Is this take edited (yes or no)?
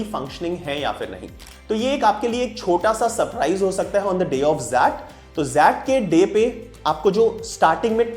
yes